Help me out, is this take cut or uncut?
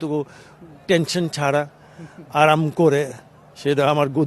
uncut